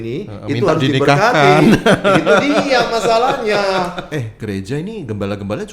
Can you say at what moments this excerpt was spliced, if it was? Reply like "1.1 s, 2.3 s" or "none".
4.2 s